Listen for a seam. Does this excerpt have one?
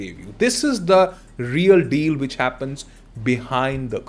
no; 0 cuts

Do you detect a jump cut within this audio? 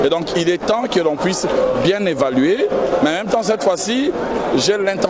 no; 0 cuts

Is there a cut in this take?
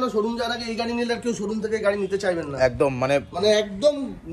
no; 0 cuts

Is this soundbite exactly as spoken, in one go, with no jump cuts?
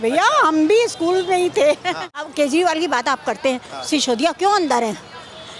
no; 1 cut; at 2.1 s

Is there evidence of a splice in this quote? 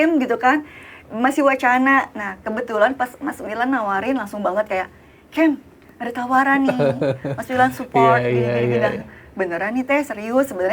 no; 0 cuts

